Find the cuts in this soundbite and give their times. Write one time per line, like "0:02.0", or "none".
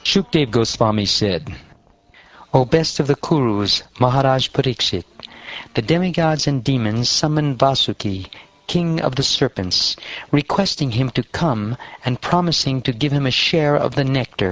none